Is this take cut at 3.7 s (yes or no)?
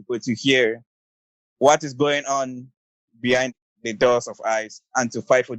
yes